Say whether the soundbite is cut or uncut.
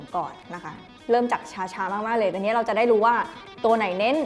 uncut